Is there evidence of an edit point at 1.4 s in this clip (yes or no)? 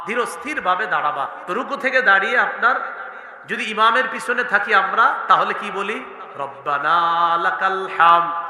yes